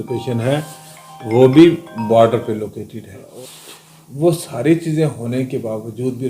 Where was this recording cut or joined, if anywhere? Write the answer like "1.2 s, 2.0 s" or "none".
3.3 s